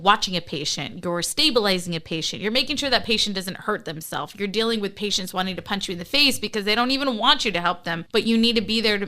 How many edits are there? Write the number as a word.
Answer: one